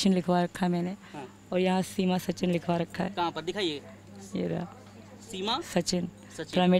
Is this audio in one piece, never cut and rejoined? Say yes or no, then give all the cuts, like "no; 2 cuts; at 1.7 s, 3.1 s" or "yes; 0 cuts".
yes; 0 cuts